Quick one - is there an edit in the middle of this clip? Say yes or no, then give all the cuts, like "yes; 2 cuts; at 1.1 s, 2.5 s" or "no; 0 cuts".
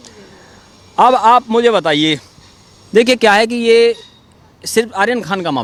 no; 0 cuts